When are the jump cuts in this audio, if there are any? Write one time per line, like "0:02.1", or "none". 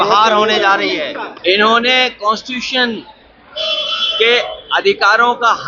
0:01.3